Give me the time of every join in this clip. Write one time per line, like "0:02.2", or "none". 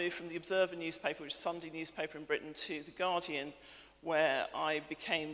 0:01.2

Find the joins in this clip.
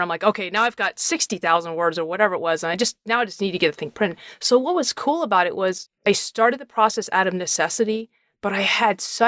0:04.3

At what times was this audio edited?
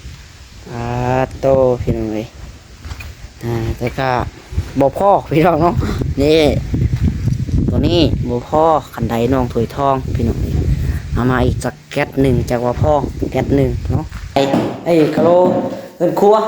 0:14.4

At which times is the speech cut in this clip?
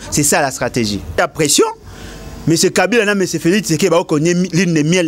0:01.1

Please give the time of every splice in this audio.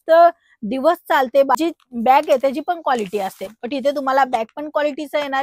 0:01.6

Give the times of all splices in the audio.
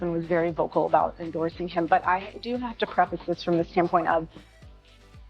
none

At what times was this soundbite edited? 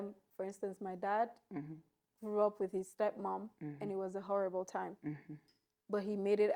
none

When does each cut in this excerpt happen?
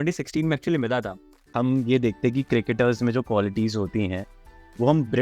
0:01.4

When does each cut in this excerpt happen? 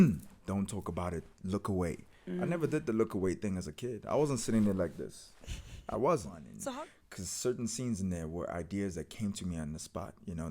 0:06.7

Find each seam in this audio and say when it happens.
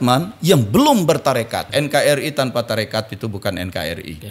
0:01.7

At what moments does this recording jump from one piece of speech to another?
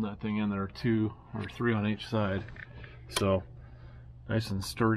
none

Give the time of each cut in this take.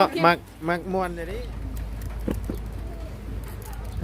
0:01.3

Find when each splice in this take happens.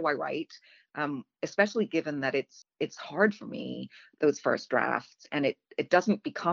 0:02.6

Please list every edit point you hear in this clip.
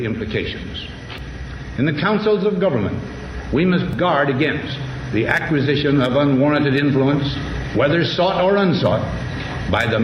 none

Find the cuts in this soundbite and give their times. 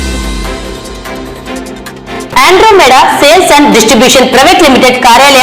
none

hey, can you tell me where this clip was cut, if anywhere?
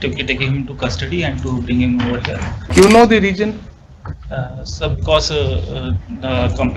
0:02.6

